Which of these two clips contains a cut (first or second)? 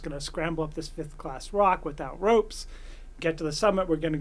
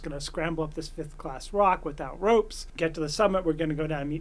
second